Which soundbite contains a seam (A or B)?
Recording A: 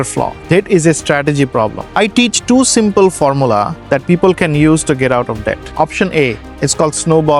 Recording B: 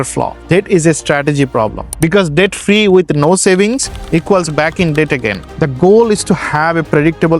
B